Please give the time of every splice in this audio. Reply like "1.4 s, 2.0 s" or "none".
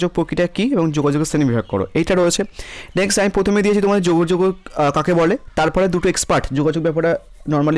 none